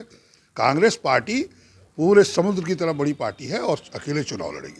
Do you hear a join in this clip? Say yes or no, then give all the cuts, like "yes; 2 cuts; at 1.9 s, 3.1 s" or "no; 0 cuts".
no; 0 cuts